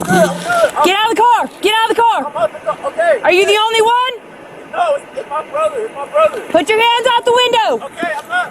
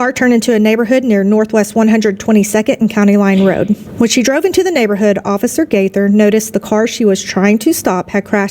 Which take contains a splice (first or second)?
first